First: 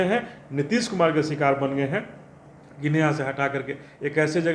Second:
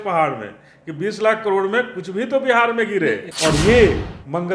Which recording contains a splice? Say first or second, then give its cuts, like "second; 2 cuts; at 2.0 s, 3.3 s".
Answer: second; 1 cut; at 3.3 s